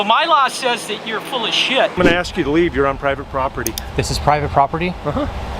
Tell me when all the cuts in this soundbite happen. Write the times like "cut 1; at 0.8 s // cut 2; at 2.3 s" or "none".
cut 1; at 2.0 s